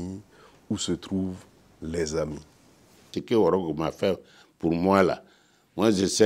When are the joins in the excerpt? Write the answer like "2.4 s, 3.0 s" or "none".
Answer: 3.2 s